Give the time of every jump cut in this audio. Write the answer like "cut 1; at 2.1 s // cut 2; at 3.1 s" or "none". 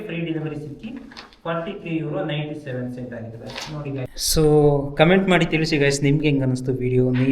cut 1; at 4.1 s